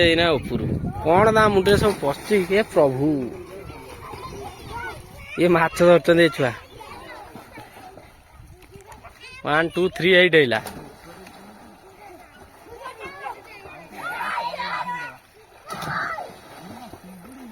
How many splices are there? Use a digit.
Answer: 0